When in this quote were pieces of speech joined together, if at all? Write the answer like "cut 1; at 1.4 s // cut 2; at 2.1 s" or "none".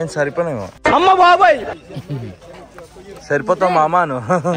none